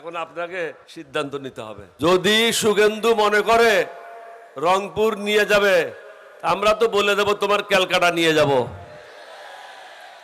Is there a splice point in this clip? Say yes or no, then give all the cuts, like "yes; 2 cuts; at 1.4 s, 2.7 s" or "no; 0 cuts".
yes; 2 cuts; at 0.9 s, 1.9 s